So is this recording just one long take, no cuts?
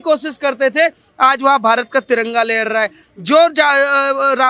yes; 0 cuts

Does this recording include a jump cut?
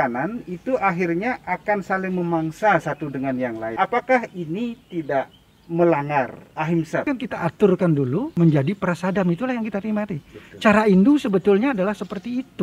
yes; 3 cuts; at 3.7 s, 7.0 s, 8.3 s

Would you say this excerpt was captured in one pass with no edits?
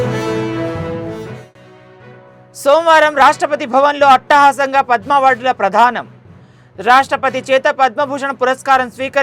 no; 1 cut; at 1.4 s

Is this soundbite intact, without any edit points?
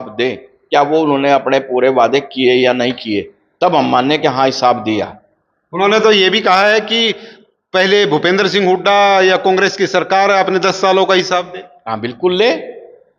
yes; 0 cuts

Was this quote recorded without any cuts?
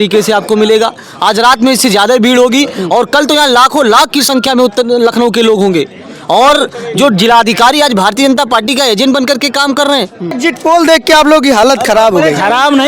no; 1 cut; at 10.3 s

